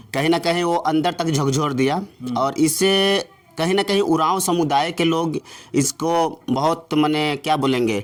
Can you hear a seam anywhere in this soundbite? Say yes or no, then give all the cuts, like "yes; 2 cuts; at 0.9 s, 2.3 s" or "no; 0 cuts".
no; 0 cuts